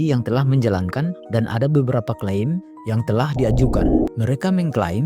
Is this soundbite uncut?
no; 2 cuts; at 1.2 s, 4.0 s

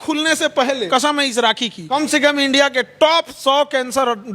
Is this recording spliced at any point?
yes; 2 cuts; at 0.9 s, 1.8 s

